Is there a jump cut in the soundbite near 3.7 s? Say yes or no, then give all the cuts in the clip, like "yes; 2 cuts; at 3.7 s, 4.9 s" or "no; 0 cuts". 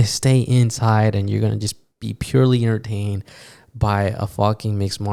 no; 0 cuts